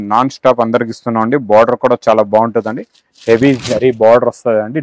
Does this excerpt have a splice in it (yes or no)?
no